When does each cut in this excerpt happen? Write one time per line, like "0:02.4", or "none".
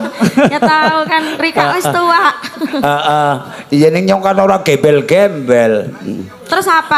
none